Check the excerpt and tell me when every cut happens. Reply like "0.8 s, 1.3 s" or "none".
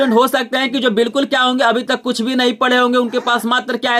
none